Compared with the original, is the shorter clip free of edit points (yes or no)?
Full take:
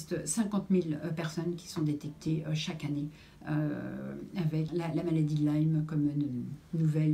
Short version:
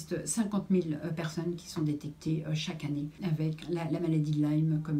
no